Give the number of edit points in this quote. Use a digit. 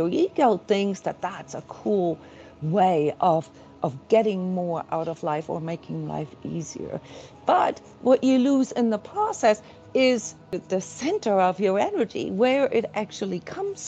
1